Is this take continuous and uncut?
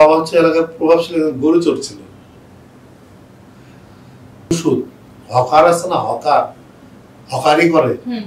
no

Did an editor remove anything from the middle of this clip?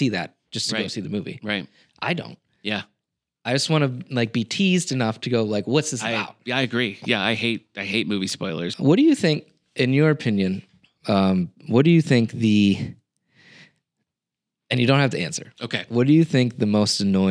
yes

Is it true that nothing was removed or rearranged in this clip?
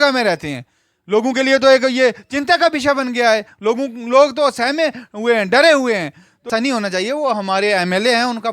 no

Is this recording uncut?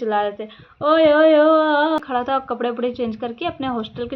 no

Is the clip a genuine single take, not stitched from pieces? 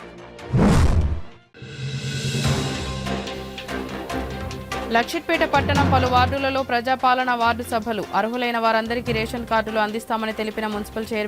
no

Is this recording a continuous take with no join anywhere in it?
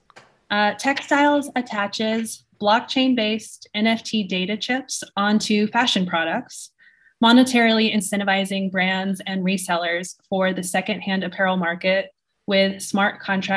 yes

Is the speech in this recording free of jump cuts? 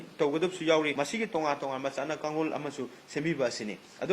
no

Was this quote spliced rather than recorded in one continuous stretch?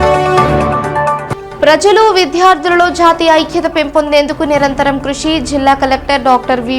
yes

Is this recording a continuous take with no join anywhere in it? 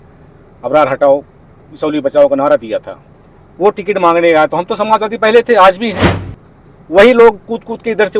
yes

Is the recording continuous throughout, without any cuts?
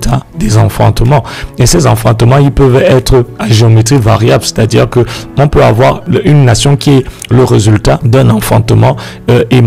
no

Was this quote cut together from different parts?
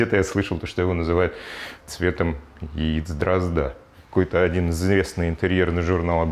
yes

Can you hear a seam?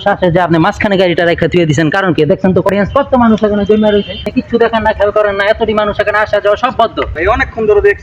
yes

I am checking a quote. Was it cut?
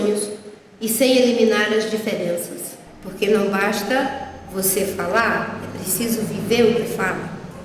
yes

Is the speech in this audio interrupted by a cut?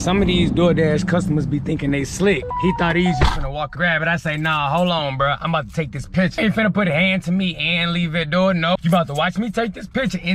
yes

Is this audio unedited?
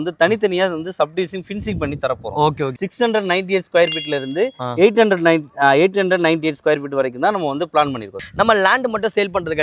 no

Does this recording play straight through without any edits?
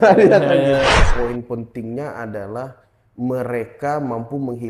no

